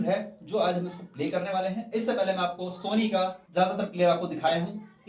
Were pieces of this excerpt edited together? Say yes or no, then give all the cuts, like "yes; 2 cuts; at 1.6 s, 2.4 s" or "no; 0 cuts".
yes; 1 cut; at 3.4 s